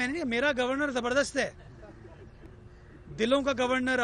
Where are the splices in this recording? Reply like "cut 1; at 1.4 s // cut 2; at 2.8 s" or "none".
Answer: none